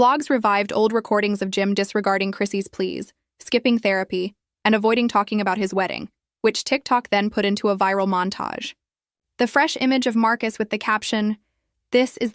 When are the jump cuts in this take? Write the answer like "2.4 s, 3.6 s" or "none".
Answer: 1.4 s